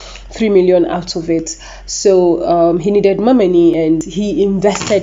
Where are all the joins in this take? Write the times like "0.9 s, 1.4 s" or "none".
3.9 s